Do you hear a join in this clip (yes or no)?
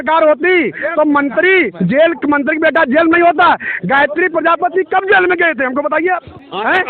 no